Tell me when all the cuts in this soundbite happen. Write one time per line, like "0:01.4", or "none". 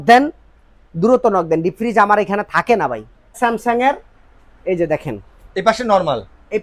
0:03.4